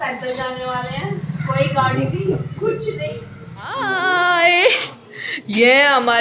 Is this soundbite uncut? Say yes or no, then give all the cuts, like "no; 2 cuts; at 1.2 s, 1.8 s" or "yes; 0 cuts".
no; 1 cut; at 3.8 s